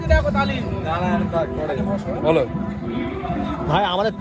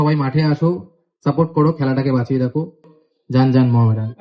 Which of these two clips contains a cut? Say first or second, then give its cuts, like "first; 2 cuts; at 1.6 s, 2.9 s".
second; 1 cut; at 3.0 s